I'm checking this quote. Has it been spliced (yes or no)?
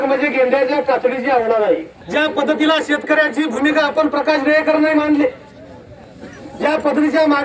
yes